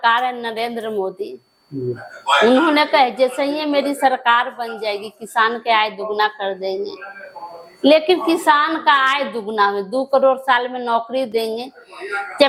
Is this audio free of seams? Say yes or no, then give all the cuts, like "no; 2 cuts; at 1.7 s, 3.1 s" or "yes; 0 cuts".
yes; 0 cuts